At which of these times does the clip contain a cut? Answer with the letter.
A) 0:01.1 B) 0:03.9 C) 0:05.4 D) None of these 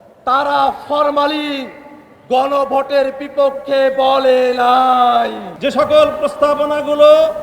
C